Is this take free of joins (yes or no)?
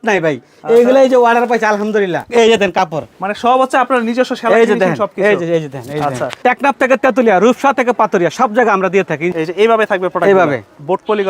no